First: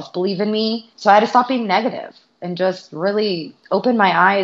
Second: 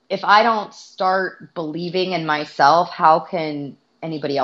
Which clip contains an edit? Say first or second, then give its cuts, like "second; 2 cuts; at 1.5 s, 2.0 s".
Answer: first; 2 cuts; at 0.9 s, 3.5 s